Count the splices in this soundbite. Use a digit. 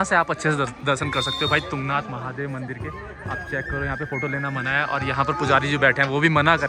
0